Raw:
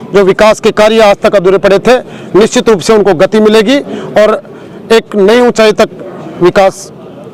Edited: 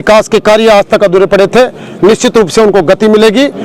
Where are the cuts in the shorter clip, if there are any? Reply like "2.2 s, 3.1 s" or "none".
none